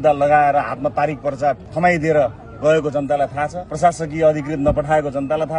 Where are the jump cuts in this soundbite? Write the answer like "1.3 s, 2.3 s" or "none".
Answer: 1.7 s, 3.6 s